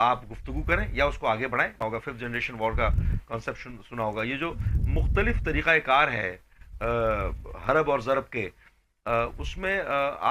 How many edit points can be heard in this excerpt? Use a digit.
1